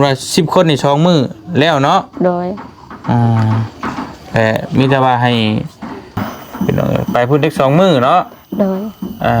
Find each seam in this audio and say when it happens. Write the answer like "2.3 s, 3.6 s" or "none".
6.2 s